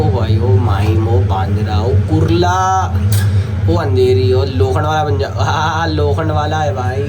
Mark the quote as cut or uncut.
uncut